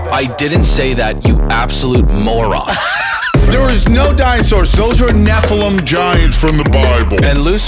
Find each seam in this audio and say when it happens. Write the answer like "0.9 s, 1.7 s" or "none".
none